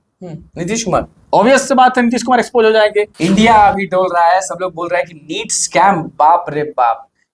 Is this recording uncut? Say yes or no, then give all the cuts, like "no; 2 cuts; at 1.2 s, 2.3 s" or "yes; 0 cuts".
no; 1 cut; at 3.1 s